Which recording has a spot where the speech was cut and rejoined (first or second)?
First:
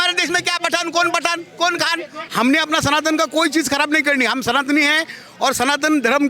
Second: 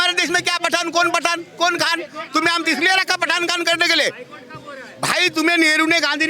first